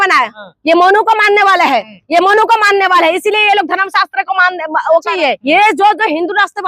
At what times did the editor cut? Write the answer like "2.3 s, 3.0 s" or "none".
5.1 s